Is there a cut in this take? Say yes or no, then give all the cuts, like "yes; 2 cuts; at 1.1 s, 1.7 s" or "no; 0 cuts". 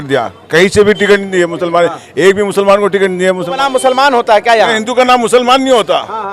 yes; 1 cut; at 3.5 s